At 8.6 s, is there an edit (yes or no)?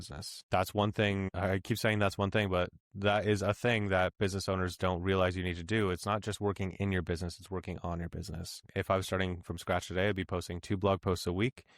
yes